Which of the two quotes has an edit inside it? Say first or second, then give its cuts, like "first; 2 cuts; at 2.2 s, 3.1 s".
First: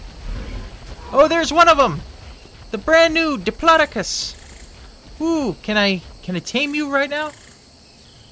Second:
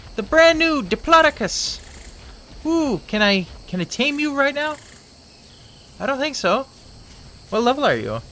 first; 1 cut; at 1.1 s